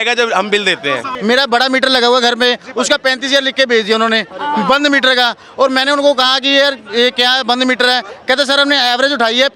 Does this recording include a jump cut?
yes; 1 cut; at 1.1 s

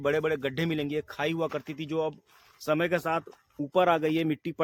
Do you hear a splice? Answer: no; 0 cuts

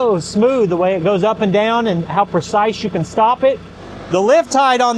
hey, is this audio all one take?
no; 1 cut; at 3.8 s

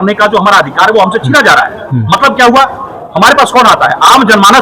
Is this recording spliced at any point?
no; 0 cuts

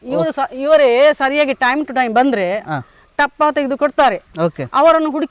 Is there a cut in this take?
no; 0 cuts

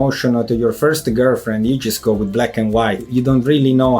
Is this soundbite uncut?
no; 1 cut; at 3.1 s

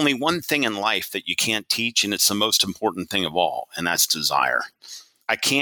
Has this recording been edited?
no; 0 cuts

